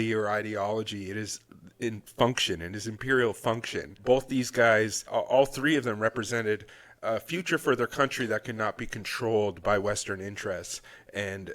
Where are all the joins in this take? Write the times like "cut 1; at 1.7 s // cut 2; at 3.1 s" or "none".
cut 1; at 2.1 s